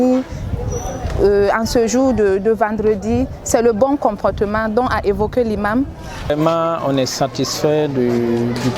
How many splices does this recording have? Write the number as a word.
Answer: one